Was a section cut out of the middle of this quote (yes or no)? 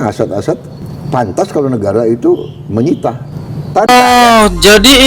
yes